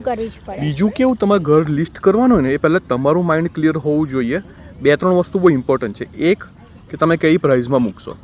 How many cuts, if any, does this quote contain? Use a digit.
0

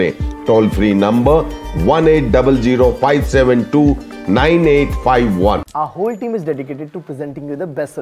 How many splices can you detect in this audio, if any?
0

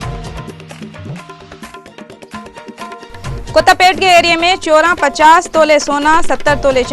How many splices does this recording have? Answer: 2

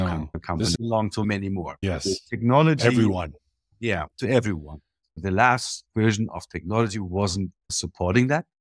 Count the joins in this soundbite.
2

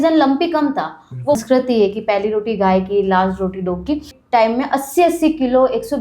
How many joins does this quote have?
2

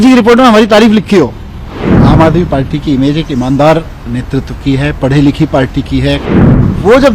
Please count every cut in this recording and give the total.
2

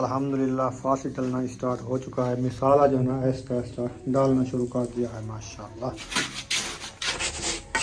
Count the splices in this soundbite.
1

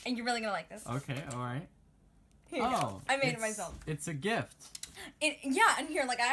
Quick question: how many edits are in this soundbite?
1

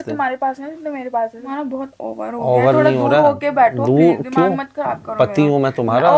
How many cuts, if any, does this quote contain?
1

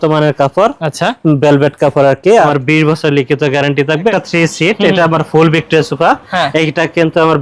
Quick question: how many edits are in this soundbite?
2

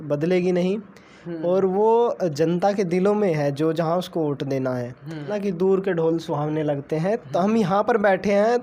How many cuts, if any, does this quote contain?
1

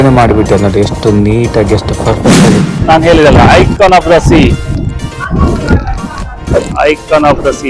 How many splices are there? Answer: 1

